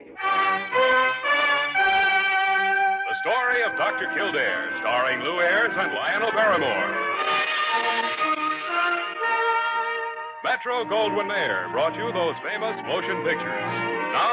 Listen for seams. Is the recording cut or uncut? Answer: uncut